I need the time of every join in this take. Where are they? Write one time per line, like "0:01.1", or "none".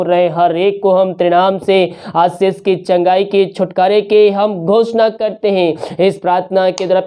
none